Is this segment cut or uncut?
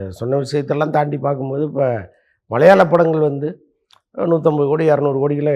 uncut